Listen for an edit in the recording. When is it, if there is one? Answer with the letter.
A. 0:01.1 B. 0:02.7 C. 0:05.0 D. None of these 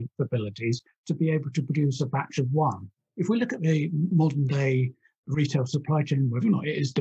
D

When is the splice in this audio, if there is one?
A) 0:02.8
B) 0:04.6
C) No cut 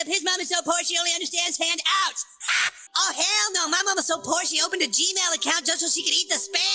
A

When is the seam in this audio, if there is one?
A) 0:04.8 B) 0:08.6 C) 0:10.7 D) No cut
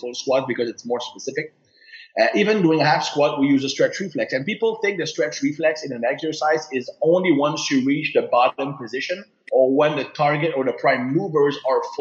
B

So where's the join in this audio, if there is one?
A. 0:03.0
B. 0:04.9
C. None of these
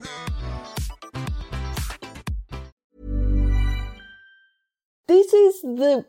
B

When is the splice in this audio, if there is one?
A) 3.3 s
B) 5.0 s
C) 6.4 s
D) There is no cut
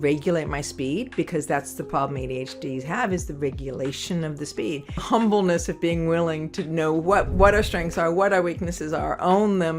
B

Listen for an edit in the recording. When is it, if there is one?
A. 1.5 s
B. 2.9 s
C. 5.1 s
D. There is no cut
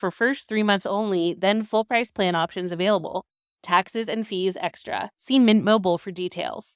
C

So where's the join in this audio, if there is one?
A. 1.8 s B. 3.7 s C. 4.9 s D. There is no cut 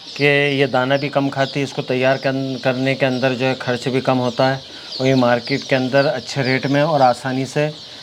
D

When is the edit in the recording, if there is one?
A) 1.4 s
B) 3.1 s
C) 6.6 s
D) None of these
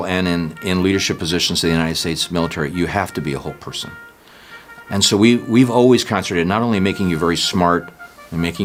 D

